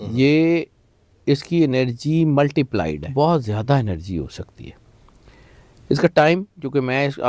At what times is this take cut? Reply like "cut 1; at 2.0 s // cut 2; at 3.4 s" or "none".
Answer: cut 1; at 3.0 s